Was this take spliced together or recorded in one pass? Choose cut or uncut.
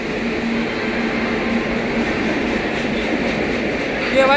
uncut